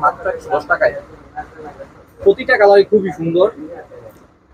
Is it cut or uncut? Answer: uncut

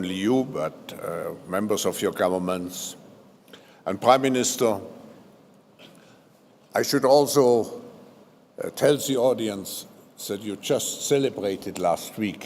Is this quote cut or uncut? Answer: uncut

